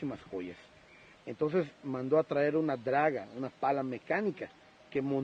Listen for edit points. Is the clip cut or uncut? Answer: uncut